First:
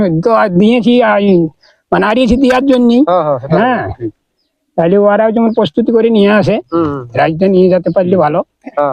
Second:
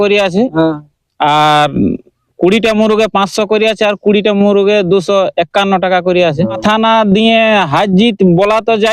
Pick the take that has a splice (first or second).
second